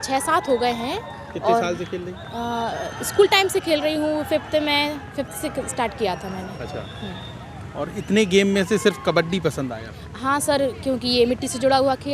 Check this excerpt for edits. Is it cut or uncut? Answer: uncut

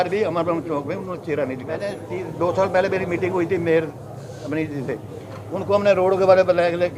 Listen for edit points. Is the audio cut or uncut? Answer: cut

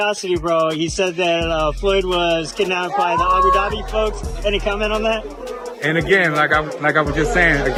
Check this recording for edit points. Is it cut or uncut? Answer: uncut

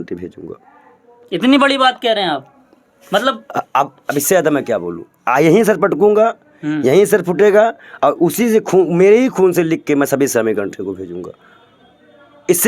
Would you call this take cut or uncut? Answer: uncut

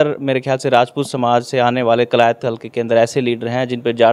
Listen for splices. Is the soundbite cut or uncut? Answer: uncut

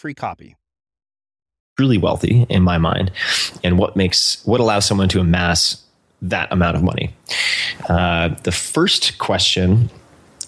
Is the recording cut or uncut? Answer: cut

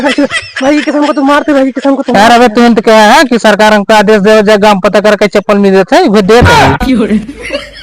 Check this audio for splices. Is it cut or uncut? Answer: cut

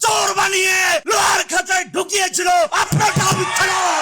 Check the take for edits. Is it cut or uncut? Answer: cut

